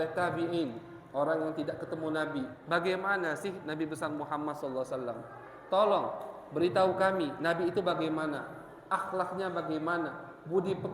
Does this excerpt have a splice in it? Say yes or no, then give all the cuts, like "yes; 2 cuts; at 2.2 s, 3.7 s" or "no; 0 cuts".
yes; 1 cut; at 2.6 s